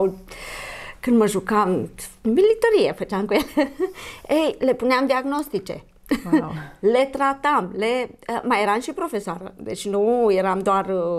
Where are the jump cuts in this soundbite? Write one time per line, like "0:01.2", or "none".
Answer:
none